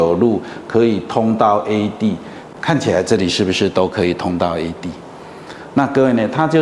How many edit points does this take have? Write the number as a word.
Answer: zero